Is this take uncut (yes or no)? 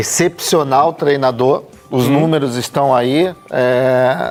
yes